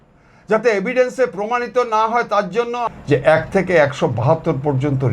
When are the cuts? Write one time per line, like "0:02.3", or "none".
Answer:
0:02.9